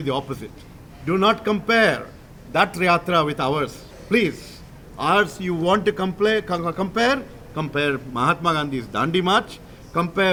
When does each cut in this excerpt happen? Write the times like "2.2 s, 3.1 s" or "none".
none